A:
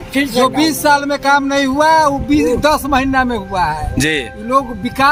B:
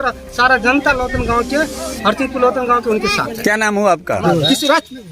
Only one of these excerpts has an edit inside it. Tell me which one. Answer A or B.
B